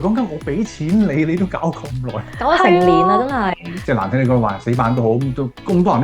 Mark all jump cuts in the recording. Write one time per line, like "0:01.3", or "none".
0:03.7